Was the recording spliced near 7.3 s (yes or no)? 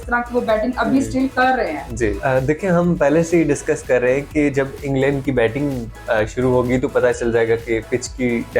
no